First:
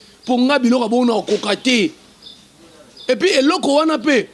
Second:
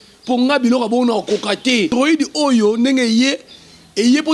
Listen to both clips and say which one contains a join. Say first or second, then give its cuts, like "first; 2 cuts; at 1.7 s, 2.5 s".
second; 1 cut; at 1.9 s